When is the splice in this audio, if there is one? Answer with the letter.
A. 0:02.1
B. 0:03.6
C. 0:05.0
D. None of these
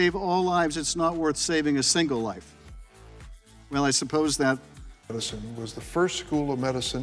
C